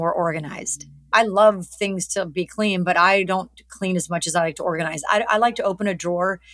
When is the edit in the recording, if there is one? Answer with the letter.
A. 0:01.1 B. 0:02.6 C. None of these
A